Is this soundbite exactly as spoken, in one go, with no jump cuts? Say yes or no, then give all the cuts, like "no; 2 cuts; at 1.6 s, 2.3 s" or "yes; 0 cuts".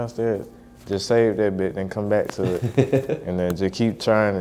yes; 0 cuts